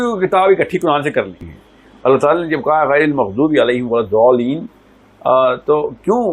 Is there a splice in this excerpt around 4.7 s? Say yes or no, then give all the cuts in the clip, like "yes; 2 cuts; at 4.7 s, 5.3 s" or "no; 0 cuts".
no; 1 cut; at 1.4 s